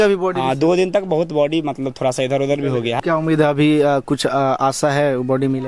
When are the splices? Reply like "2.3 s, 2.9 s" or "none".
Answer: 3.0 s